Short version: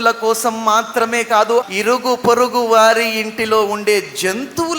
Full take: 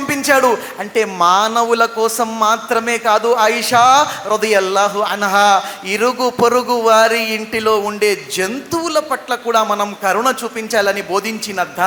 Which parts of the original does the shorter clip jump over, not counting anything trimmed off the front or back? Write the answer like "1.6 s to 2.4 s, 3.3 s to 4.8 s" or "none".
3.4 s to 5.8 s